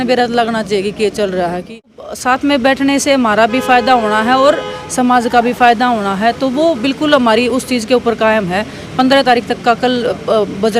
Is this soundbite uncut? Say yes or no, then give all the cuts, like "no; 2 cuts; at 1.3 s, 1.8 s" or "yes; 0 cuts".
no; 1 cut; at 2.1 s